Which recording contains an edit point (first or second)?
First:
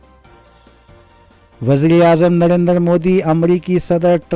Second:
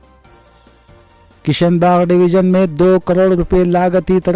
first